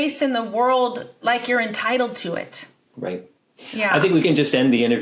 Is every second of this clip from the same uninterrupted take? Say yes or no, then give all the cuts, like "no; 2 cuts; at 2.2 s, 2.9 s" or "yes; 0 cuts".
no; 2 cuts; at 1.1 s, 4.2 s